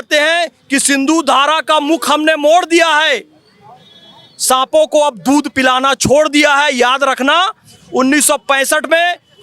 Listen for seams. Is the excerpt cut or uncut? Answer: uncut